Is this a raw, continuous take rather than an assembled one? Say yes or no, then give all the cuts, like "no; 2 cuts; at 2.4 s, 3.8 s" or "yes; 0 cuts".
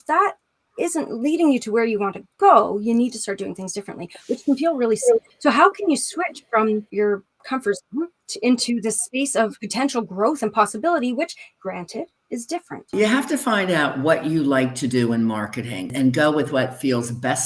no; 7 cuts; at 5.3 s, 6.9 s, 8.2 s, 9.6 s, 11.5 s, 12.9 s, 15.9 s